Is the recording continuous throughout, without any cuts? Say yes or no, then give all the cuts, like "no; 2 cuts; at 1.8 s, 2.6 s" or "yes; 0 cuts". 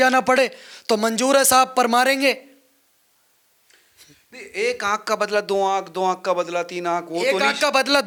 yes; 0 cuts